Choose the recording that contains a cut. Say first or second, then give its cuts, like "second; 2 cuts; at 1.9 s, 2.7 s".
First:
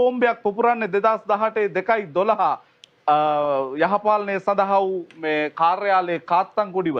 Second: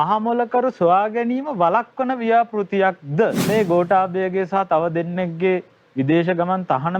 second; 1 cut; at 3.4 s